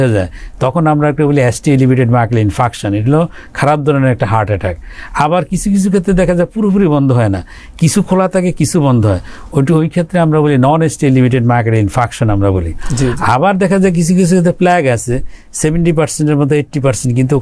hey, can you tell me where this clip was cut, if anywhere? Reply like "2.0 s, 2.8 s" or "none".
none